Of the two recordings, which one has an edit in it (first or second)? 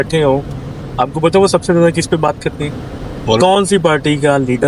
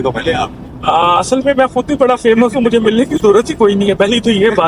first